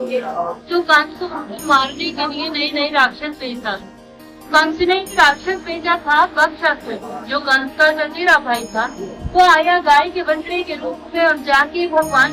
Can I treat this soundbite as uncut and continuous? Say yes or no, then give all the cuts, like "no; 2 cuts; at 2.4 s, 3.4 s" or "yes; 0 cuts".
yes; 0 cuts